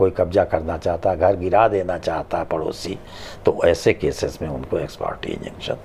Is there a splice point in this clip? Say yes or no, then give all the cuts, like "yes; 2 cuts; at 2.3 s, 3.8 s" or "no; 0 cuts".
no; 0 cuts